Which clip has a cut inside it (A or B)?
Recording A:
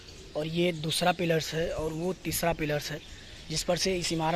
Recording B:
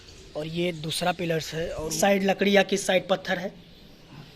B